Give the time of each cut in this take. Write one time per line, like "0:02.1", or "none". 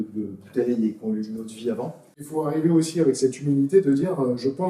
0:02.2